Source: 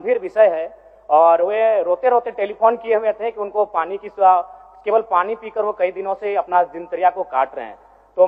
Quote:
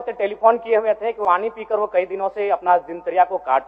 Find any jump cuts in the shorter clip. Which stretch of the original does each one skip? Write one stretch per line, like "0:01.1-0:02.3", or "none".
0:03.4-0:05.1